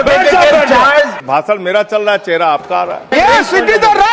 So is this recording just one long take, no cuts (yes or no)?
no